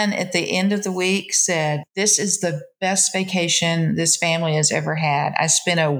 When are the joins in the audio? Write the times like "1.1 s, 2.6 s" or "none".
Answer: none